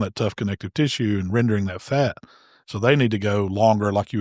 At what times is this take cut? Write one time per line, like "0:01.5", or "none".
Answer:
none